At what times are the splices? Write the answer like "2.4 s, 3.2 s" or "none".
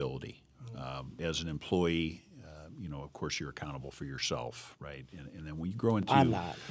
1.2 s

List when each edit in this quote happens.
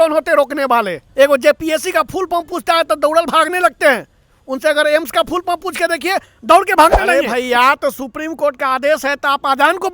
1.0 s, 7.0 s

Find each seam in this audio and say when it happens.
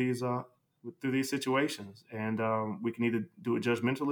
none

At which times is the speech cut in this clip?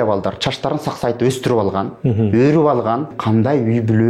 3.1 s

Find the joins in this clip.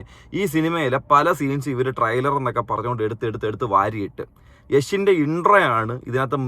none

